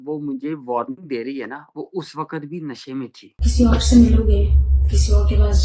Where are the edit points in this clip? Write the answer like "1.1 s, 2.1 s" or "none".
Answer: 3.4 s

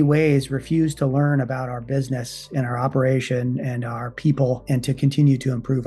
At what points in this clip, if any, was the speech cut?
none

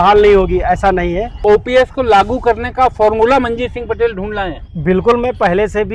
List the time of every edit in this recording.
1.4 s

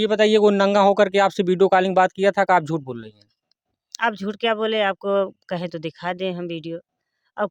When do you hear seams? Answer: none

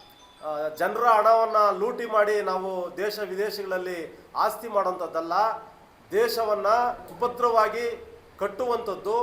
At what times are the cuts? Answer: 7.1 s

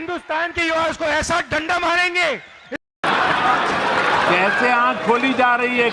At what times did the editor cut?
3.0 s

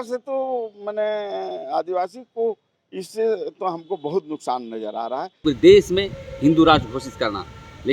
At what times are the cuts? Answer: 5.3 s

